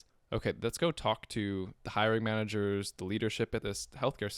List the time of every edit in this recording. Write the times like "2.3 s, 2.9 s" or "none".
1.8 s, 3.6 s

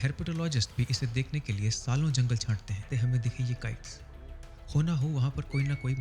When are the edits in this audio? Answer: 2.8 s

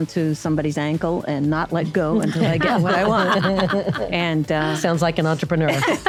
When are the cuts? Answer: none

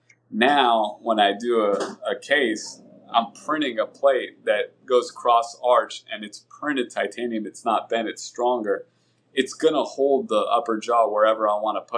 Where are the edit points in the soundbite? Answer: none

